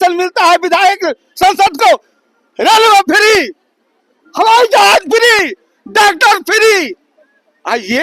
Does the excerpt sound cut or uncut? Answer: uncut